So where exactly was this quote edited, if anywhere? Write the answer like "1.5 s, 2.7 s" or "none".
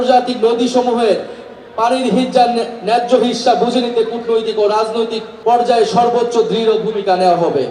5.2 s